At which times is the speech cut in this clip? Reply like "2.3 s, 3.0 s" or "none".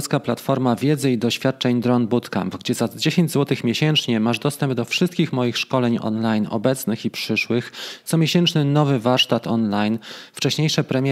none